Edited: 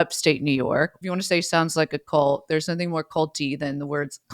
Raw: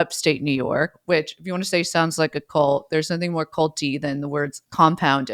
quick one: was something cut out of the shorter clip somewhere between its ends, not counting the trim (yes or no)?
yes